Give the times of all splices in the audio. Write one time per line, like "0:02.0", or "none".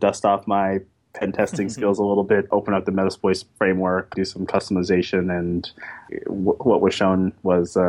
0:02.5
0:04.1
0:06.1

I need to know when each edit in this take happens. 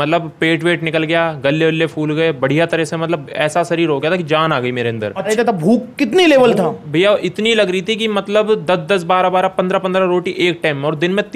0:05.3

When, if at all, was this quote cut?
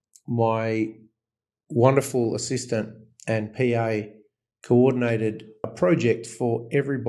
0:05.7

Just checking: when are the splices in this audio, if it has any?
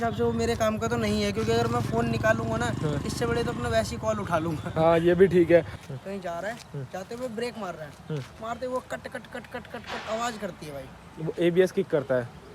0:05.8

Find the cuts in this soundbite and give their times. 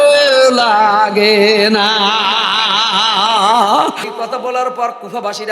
0:04.1

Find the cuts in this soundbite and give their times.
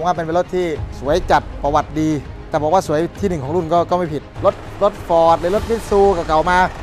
0:00.8
0:02.3
0:04.2

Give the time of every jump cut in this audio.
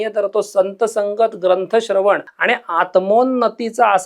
0:02.3

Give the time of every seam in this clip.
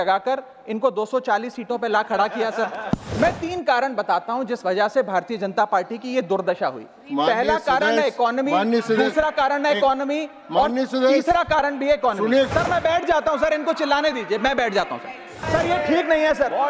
0:03.1
0:12.5
0:15.5

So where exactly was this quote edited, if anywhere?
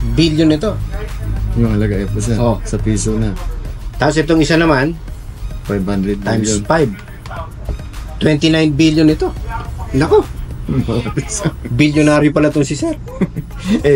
none

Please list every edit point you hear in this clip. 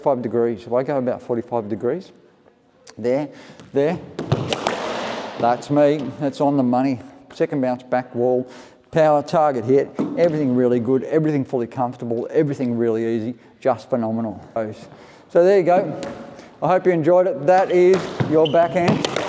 0:14.6

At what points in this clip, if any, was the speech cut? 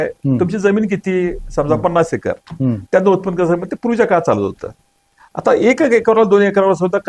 none

